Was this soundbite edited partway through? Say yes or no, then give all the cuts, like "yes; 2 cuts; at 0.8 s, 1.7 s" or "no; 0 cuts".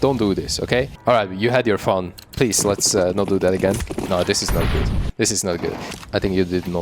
yes; 3 cuts; at 0.9 s, 3.9 s, 5.9 s